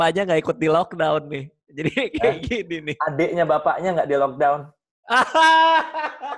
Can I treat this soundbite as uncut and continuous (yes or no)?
yes